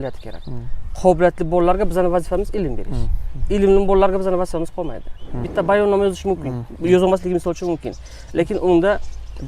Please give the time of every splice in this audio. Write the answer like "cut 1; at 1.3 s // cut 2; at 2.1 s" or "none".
cut 1; at 5.5 s

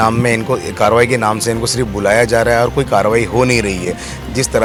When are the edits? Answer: none

